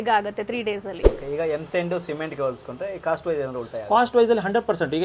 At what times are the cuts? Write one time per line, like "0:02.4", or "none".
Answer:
0:01.0